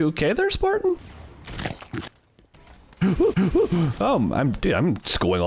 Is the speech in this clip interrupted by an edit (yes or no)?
yes